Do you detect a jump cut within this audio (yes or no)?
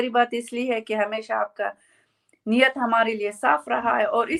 no